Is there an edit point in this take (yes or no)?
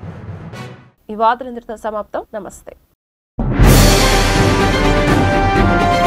no